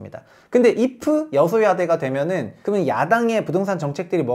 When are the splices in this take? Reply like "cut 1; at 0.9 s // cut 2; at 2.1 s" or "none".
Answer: cut 1; at 2.5 s

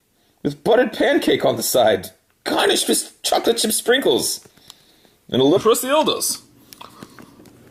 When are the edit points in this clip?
none

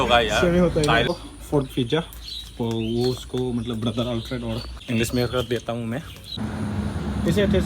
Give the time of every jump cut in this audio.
cut 1; at 1.1 s // cut 2; at 4.7 s // cut 3; at 6.4 s

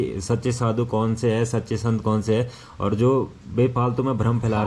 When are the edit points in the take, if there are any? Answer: none

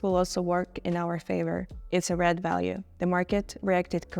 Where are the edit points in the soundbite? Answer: cut 1; at 1.7 s

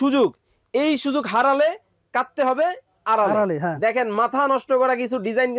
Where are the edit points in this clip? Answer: none

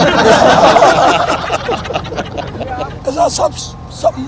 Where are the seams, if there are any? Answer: cut 1; at 3.0 s

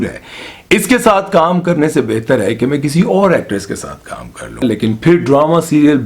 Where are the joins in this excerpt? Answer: cut 1; at 4.6 s

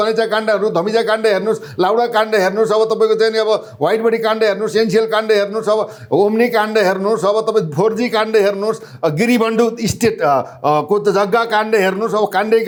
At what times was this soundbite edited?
none

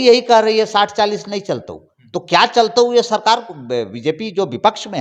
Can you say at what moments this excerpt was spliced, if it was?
none

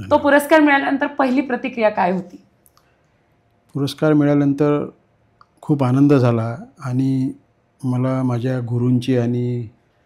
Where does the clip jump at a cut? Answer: none

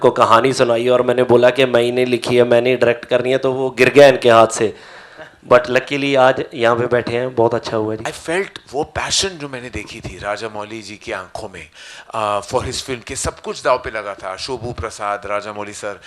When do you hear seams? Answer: cut 1; at 8.0 s

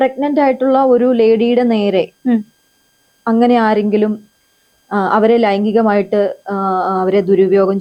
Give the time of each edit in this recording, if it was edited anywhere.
none

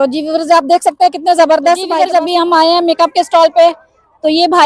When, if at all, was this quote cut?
cut 1; at 1.9 s

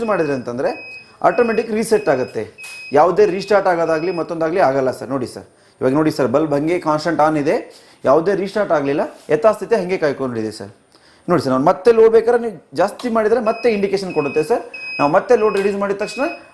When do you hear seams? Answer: none

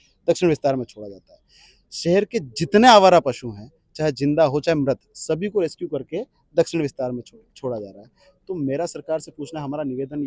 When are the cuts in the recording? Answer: none

